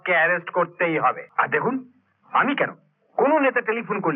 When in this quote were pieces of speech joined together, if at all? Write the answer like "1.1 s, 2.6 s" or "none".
1.2 s

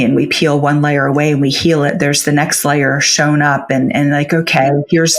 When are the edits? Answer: none

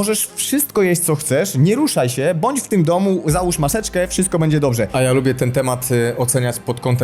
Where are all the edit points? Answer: 4.9 s

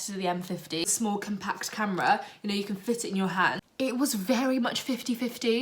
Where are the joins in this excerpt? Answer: 0.9 s, 3.6 s

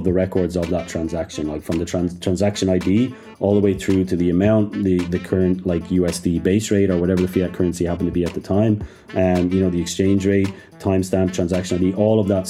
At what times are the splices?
none

